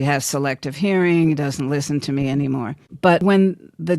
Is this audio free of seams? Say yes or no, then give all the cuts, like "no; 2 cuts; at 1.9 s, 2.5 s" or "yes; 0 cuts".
no; 1 cut; at 3.0 s